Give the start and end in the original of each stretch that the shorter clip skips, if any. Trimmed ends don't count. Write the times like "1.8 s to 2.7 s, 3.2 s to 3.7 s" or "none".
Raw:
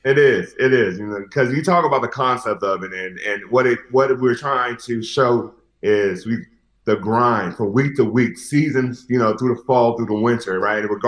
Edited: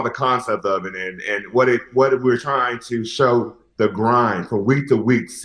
5.6 s to 6.7 s